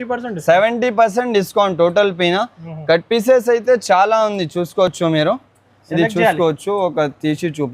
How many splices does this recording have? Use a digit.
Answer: 0